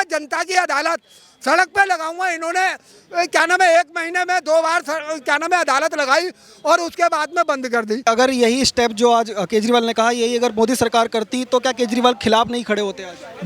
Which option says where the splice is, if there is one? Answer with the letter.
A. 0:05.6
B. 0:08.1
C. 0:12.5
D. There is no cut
B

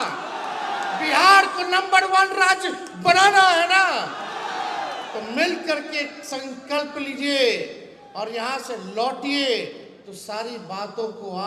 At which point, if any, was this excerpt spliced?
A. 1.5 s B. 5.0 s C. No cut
C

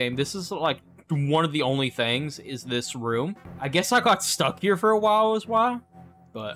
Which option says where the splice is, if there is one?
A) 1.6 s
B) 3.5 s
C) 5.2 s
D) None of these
B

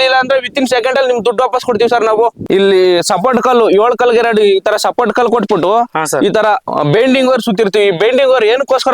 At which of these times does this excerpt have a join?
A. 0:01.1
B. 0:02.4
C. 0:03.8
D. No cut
B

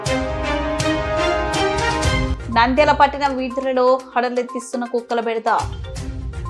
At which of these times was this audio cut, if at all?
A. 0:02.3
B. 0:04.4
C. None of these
A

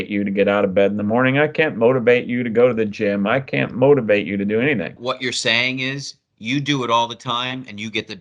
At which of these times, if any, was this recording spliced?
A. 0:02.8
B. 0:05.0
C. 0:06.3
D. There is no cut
B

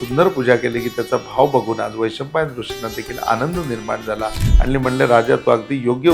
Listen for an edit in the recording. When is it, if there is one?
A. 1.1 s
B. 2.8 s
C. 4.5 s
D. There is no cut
C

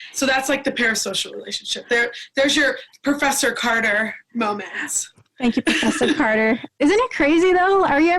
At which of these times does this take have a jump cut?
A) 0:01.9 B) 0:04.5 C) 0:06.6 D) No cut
C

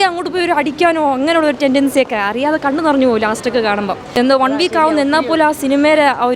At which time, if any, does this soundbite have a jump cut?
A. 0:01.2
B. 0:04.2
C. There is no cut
B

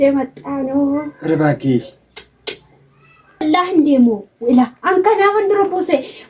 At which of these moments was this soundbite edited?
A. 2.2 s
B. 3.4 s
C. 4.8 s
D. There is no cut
B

